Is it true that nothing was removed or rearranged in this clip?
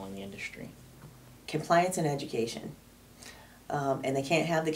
no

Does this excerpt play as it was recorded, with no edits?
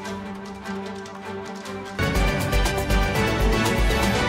yes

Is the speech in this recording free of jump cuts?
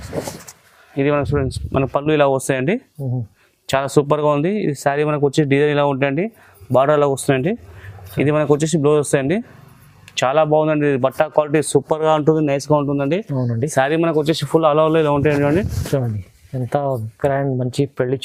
yes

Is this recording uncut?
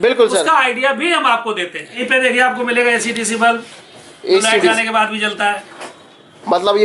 no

